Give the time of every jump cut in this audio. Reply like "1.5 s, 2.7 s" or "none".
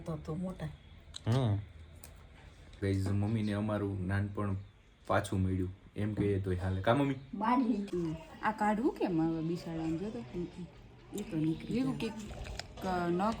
2.8 s, 7.9 s